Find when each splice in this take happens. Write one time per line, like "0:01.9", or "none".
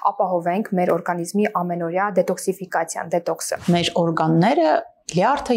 0:03.6